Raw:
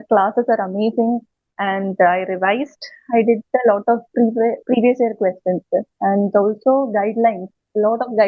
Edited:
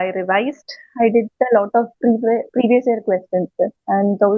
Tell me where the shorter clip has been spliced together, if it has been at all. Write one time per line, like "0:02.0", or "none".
none